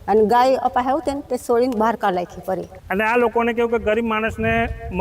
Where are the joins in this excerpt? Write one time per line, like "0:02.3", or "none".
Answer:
0:02.8